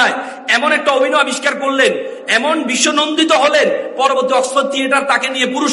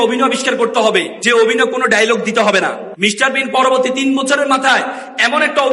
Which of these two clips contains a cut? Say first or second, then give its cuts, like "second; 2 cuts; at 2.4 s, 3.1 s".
second; 2 cuts; at 1.1 s, 2.9 s